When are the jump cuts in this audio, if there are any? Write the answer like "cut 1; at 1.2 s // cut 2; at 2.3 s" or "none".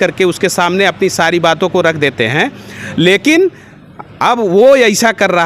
none